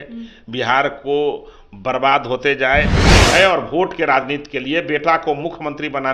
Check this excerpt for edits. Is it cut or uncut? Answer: cut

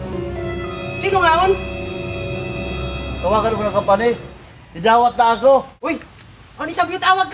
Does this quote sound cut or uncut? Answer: cut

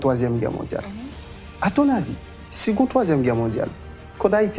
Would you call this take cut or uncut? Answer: uncut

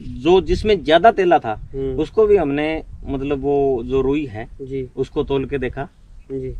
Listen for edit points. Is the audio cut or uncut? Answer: uncut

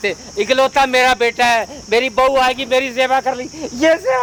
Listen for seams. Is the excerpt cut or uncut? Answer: uncut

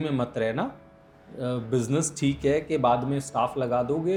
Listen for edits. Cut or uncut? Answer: uncut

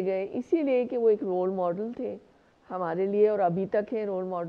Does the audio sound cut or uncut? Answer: uncut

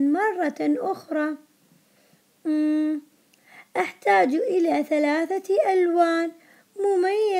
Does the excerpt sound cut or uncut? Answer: cut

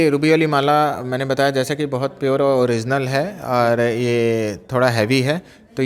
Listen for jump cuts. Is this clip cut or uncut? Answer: uncut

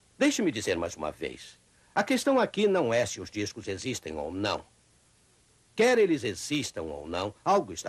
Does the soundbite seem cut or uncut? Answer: uncut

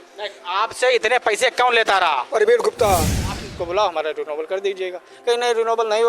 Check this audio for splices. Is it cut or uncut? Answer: cut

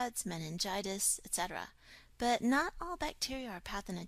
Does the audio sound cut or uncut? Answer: uncut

